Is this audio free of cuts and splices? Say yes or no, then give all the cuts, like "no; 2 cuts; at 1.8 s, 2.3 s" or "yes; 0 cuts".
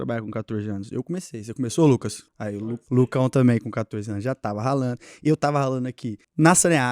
yes; 0 cuts